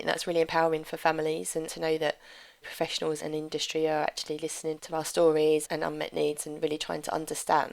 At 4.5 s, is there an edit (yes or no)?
no